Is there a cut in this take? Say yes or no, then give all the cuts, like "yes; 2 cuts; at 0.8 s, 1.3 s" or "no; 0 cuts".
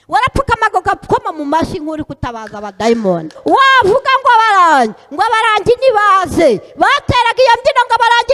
yes; 1 cut; at 3.3 s